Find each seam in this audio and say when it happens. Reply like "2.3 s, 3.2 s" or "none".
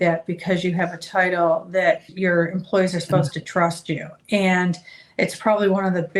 2.1 s